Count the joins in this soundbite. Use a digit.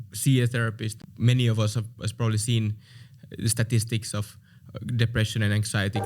1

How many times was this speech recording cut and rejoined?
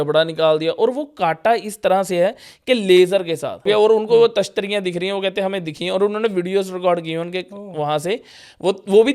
1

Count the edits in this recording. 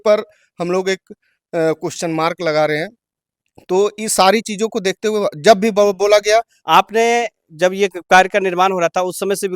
1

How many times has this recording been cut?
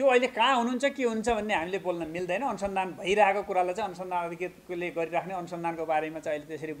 0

